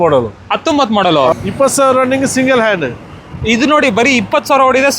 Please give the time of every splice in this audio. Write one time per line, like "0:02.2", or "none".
0:01.3